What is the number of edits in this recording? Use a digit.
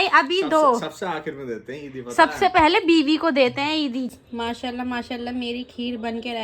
1